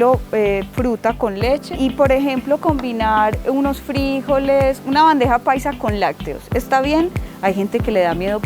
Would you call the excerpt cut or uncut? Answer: cut